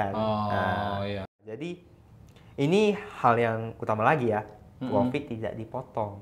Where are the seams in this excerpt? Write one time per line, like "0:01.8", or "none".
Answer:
0:01.3